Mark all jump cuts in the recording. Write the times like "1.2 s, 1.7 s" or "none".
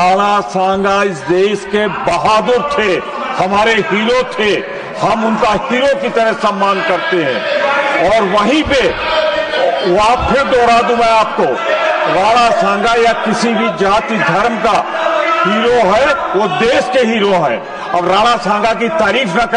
none